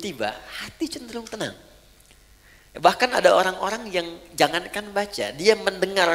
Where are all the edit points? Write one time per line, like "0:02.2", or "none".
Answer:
none